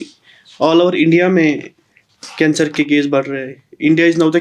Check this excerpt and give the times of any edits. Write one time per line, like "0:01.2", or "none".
none